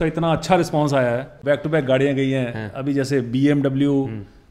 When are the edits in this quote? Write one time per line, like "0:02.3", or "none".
0:01.4